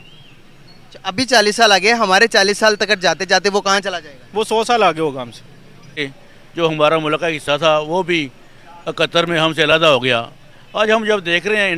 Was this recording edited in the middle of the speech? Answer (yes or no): yes